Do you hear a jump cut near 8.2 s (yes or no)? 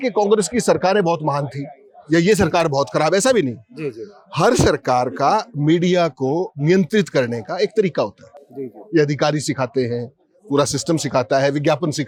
no